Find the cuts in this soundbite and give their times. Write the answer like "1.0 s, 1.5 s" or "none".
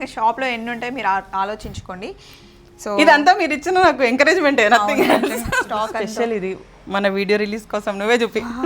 5.6 s